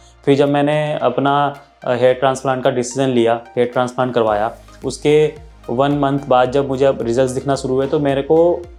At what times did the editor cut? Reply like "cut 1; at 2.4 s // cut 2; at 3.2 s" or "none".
none